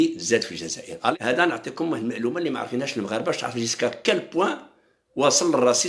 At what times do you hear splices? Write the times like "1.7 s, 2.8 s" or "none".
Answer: 1.1 s